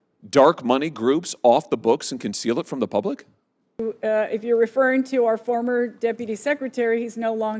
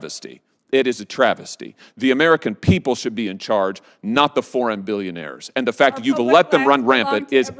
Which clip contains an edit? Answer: first; 1 cut; at 3.8 s

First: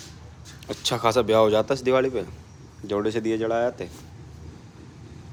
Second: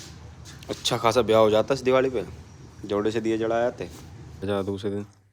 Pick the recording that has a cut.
second; 1 cut; at 4.4 s

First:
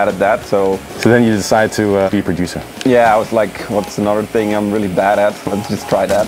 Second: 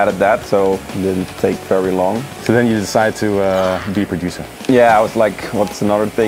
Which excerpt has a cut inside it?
first; 2 cuts; at 0.9 s, 2.1 s

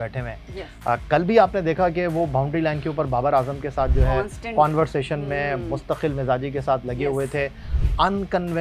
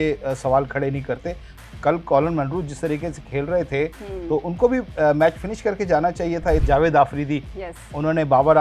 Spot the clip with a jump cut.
second; 1 cut; at 6.6 s

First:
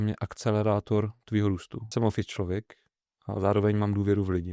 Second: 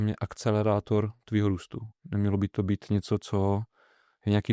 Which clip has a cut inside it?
first; 1 cut; at 1.9 s

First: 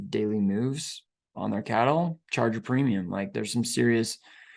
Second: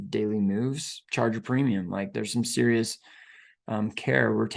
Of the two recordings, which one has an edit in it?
second; 1 cut; at 1.0 s

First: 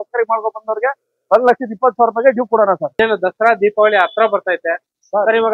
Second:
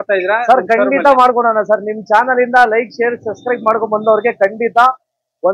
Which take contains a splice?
first; 1 cut; at 3.0 s

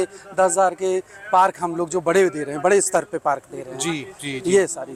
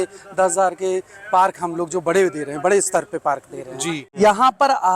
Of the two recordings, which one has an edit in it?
second; 1 cut; at 4.0 s

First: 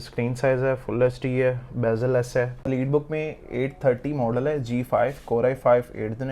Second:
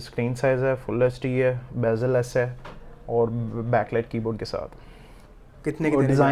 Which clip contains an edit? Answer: first; 1 cut; at 2.7 s

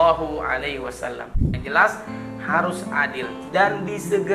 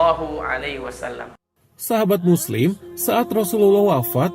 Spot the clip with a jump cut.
first; 1 cut; at 1.6 s

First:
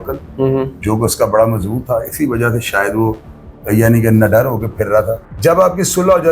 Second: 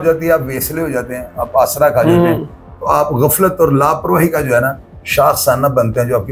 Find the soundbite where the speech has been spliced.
first; 1 cut; at 5.2 s

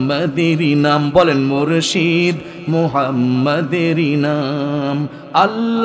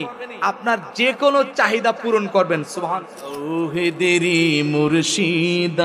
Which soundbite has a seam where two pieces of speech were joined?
second; 1 cut; at 2.9 s

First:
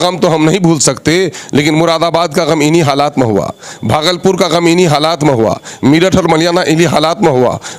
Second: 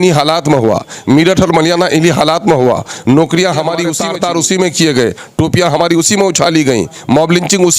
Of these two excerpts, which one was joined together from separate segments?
second; 1 cut; at 4.0 s

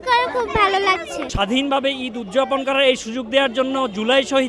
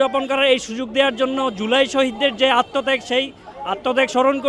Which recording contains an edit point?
first; 1 cut; at 1.3 s

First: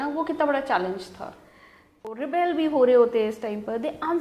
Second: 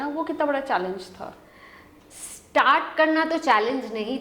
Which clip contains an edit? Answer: first; 1 cut; at 2.2 s

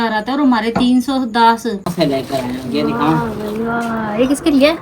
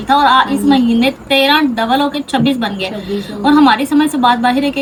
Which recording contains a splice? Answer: first; 1 cut; at 1.9 s

